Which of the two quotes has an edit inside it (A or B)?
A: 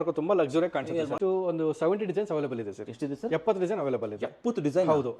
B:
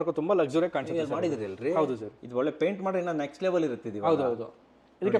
A